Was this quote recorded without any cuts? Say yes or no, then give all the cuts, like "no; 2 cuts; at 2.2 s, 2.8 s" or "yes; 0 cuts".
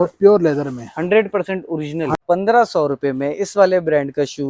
no; 1 cut; at 2.2 s